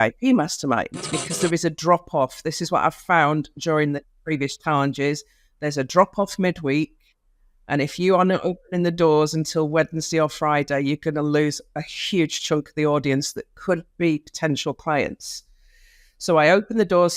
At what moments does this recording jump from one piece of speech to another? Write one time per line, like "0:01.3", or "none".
0:01.2